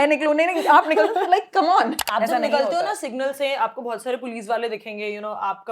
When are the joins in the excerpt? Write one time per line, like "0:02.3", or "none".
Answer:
0:02.0

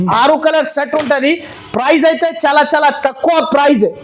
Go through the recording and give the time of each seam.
none

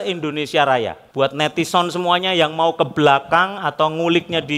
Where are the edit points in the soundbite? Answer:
0:01.0

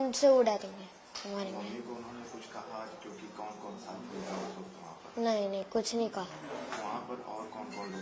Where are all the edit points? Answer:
none

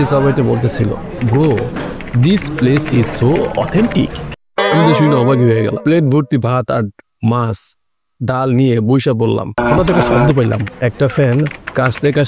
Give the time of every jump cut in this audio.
0:05.8
0:09.5

